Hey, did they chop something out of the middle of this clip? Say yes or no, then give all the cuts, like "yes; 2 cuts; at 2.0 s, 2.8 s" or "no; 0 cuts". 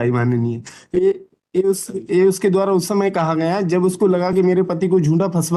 no; 0 cuts